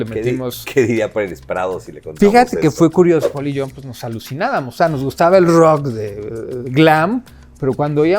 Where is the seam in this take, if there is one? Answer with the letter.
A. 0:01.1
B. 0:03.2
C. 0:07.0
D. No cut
B